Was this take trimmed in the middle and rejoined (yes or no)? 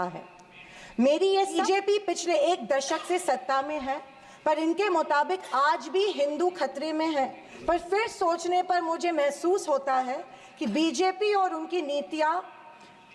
yes